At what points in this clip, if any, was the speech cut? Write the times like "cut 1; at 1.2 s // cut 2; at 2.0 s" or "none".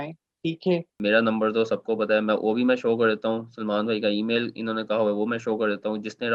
cut 1; at 0.9 s